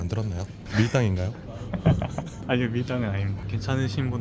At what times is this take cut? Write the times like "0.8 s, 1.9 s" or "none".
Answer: 2.5 s